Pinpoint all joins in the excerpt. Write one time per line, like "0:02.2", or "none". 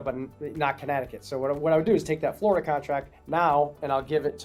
none